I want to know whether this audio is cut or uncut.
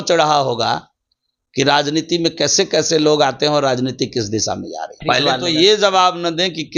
cut